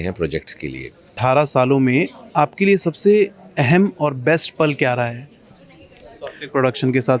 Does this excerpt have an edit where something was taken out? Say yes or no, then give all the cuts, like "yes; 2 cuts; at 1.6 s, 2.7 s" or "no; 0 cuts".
yes; 1 cut; at 1.1 s